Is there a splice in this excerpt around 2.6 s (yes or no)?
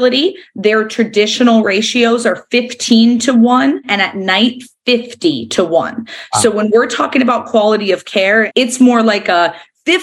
no